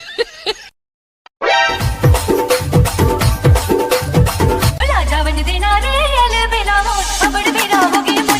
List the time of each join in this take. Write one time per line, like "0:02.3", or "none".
0:04.7